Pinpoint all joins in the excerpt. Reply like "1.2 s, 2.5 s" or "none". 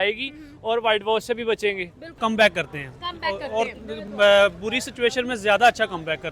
2.2 s